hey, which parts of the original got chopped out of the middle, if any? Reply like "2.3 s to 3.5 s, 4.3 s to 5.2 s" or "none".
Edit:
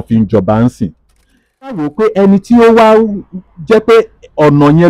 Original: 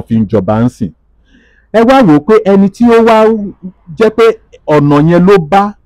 1.7 s to 2.0 s